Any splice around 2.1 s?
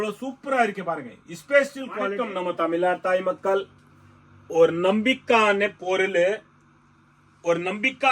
yes; 1 cut; at 2.1 s

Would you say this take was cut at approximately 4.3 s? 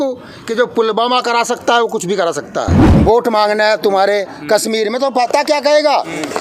no; 1 cut; at 2.9 s

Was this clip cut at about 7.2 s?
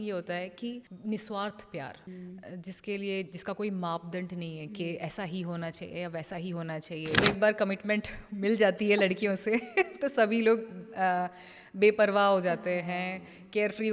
yes; 3 cuts; at 0.9 s, 2.1 s, 7.2 s

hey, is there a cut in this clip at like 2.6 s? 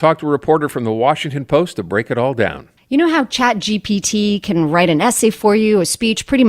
yes; 1 cut; at 2.6 s

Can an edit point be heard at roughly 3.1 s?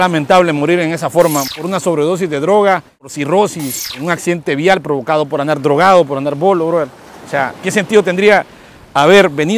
yes; 3 cuts; at 1.5 s, 3.1 s, 4.0 s

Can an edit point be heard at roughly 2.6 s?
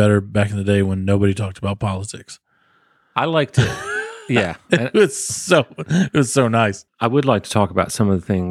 no; 1 cut; at 6.8 s

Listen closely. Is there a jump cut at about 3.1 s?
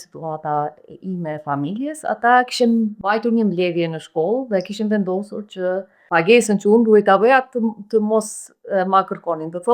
yes; 2 cuts; at 3.1 s, 6.0 s

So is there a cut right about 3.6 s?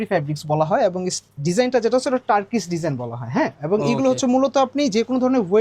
no; 0 cuts

